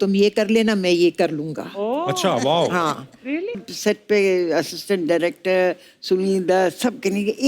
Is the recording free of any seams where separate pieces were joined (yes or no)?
no